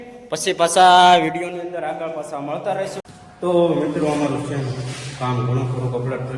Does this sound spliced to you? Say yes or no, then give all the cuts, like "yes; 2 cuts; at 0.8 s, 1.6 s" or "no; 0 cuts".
yes; 1 cut; at 3.0 s